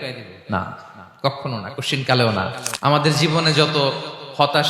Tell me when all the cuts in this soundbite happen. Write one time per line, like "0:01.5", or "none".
0:02.7